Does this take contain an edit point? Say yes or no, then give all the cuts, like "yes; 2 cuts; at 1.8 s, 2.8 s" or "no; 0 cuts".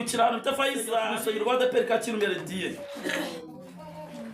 yes; 1 cut; at 1.1 s